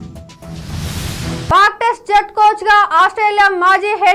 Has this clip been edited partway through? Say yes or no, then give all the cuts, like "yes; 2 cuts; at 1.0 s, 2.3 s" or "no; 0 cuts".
no; 0 cuts